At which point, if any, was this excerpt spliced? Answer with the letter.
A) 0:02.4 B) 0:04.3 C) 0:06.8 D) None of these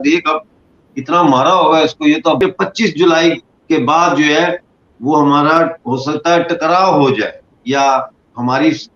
A